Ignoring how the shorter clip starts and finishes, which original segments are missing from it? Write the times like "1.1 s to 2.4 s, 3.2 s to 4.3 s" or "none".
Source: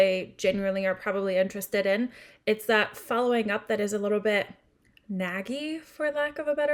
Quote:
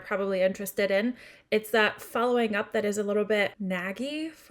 4.5 s to 5.0 s